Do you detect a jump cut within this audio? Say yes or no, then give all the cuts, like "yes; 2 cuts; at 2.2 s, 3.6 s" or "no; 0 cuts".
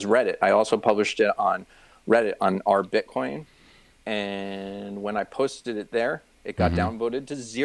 no; 0 cuts